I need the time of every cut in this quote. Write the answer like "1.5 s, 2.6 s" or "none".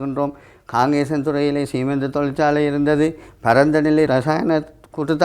4.1 s